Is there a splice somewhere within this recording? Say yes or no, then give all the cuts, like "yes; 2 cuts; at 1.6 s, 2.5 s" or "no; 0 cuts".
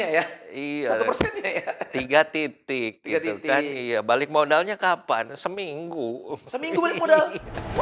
no; 0 cuts